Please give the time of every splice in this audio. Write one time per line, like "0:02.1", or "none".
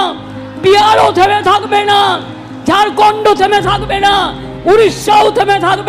none